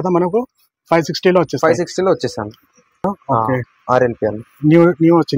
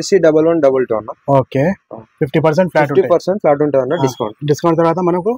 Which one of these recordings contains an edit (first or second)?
first